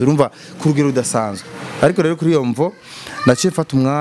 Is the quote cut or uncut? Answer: uncut